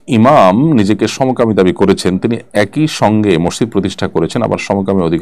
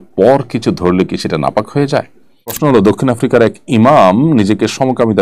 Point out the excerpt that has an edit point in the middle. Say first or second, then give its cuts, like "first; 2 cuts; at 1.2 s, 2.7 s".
second; 1 cut; at 2.6 s